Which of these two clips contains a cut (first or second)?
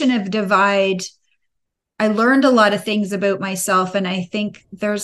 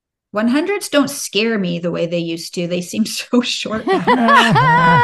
second